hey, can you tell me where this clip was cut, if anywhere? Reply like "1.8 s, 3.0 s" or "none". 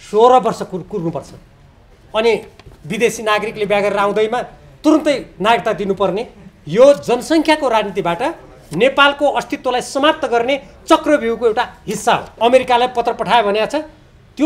12.3 s